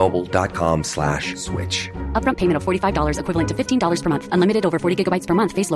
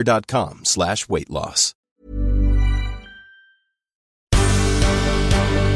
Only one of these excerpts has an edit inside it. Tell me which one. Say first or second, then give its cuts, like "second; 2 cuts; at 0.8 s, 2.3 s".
second; 2 cuts; at 1.8 s, 4.2 s